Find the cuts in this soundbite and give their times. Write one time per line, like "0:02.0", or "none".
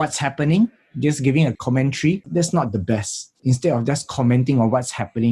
0:02.2
0:03.4